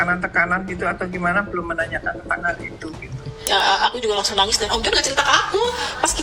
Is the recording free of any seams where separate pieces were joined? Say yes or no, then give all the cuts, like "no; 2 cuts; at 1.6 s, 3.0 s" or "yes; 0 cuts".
no; 1 cut; at 3.4 s